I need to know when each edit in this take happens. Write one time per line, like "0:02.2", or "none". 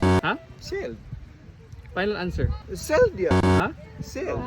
0:02.7